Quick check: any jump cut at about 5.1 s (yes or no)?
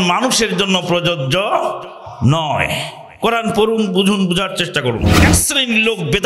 yes